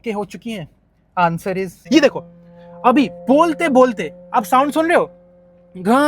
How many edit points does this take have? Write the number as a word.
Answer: one